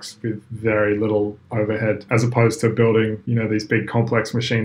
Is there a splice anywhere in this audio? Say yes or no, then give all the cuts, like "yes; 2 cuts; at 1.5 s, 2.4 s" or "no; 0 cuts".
yes; 2 cuts; at 2.0 s, 3.2 s